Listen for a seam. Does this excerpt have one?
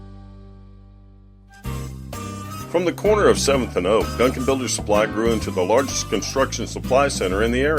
yes; 1 cut; at 1.4 s

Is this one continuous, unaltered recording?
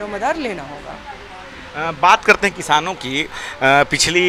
yes; 0 cuts

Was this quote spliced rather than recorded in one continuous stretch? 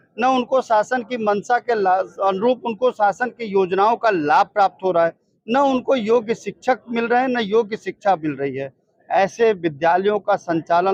no; 0 cuts

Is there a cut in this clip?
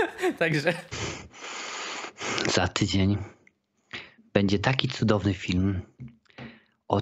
yes; 1 cut; at 0.9 s

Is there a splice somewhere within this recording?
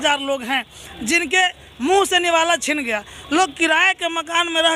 no; 0 cuts

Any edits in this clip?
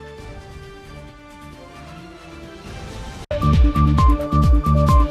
yes; 1 cut; at 3.3 s

